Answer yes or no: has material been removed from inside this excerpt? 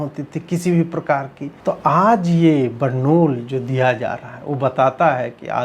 yes